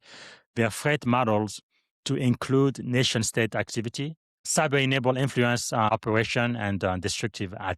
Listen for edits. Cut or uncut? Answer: cut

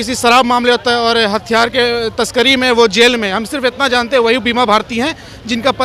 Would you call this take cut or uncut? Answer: uncut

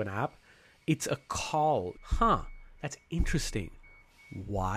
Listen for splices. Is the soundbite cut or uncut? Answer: uncut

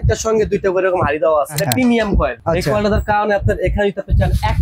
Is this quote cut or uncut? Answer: cut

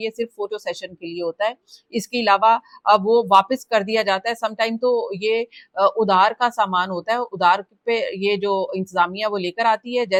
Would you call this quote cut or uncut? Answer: uncut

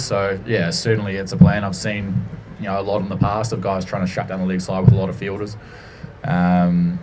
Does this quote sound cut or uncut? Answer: uncut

